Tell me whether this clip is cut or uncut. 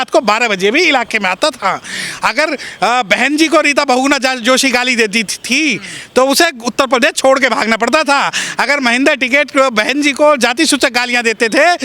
uncut